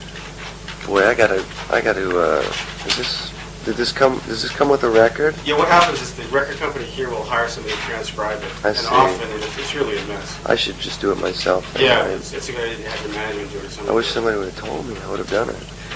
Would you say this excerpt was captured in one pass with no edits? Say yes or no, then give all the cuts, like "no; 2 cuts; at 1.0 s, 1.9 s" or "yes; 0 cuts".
no; 1 cut; at 14.9 s